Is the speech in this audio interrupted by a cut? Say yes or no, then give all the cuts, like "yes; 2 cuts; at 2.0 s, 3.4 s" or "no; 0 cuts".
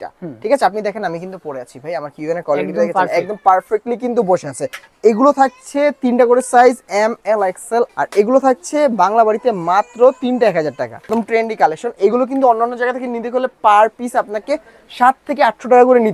yes; 3 cuts; at 4.8 s, 7.9 s, 11.1 s